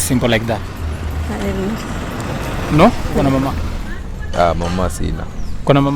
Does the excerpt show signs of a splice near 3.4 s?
yes; 1 cut; at 3.4 s

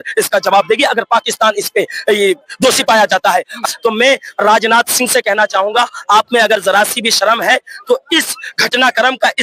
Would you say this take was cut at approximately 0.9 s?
no; 1 cut; at 3.6 s

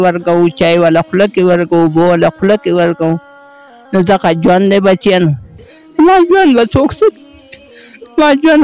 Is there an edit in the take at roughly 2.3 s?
no; 1 cut; at 5.3 s

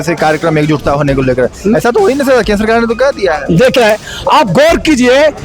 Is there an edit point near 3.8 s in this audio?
yes; 1 cut; at 3.8 s

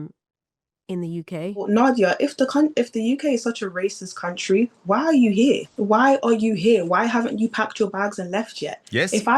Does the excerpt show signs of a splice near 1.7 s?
yes; 2 cuts; at 1.7 s, 5.7 s

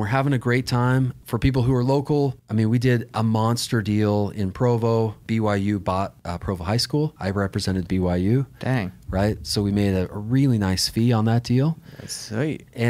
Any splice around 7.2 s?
yes; 5 cuts; at 1.1 s, 2.4 s, 5.2 s, 6.2 s, 7.2 s

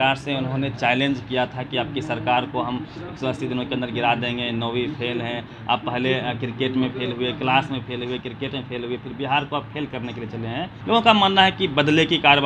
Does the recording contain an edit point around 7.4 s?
no; 0 cuts

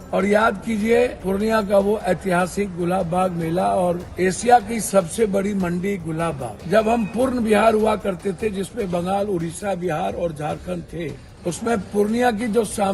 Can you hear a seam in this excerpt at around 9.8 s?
no; 4 cuts; at 1.2 s, 4.1 s, 6.5 s, 11.3 s

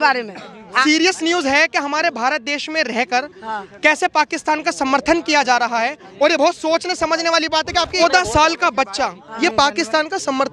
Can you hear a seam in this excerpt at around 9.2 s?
yes; 3 cuts; at 0.8 s, 8.0 s, 9.2 s

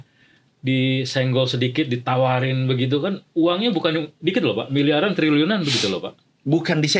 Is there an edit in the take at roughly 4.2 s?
no; 0 cuts

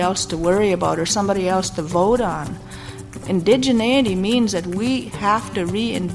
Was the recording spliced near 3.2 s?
yes; 1 cut; at 3.2 s

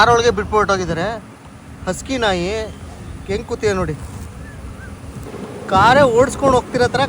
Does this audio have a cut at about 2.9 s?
no; 1 cut; at 5.3 s

